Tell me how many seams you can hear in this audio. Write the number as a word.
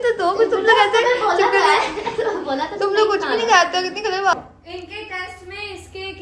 one